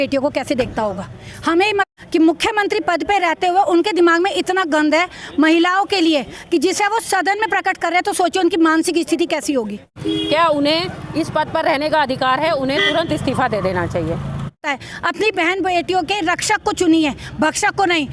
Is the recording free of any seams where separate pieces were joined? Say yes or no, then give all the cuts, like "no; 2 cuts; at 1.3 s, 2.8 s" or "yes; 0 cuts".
no; 3 cuts; at 1.8 s, 9.9 s, 14.6 s